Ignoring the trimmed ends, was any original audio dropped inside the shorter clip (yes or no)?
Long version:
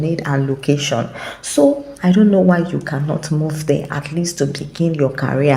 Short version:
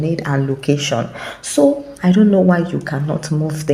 no